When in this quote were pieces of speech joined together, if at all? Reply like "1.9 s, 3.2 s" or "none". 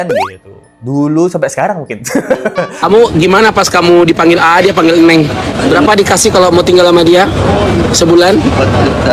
2.8 s, 5.6 s